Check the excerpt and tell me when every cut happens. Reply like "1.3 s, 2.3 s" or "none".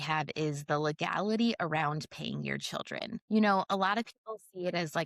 3.2 s